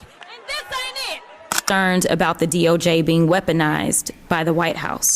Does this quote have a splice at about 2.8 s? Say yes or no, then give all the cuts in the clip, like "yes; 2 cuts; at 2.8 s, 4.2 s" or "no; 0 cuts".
no; 1 cut; at 1.6 s